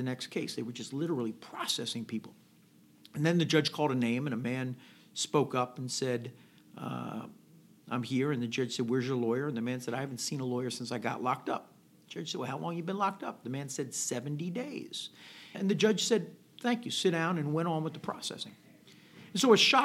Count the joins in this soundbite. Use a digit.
1